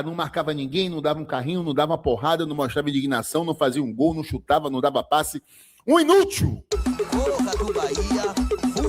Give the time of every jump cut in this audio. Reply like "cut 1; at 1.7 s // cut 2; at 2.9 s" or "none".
cut 1; at 6.7 s